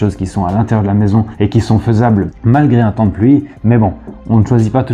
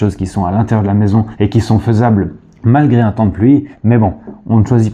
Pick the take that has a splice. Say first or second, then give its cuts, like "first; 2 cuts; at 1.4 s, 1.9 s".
first; 1 cut; at 2.3 s